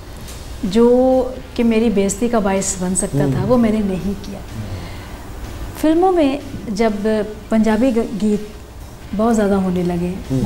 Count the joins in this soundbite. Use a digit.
0